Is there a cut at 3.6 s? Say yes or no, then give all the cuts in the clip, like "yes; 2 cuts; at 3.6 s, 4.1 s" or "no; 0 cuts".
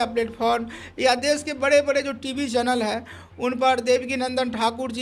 no; 0 cuts